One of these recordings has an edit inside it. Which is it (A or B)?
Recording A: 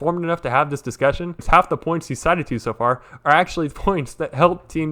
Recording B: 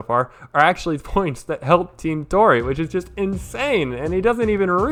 A